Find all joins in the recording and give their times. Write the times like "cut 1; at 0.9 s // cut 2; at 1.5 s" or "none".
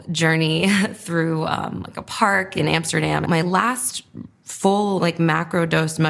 cut 1; at 3.2 s